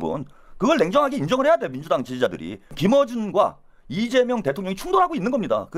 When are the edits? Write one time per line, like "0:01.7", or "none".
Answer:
0:02.7